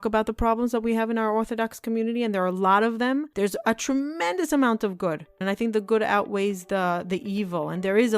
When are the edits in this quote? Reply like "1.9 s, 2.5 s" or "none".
3.3 s, 5.4 s

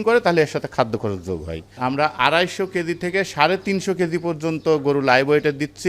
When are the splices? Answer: 1.8 s

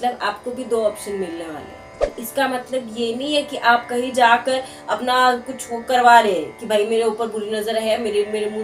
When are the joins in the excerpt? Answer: 2.2 s

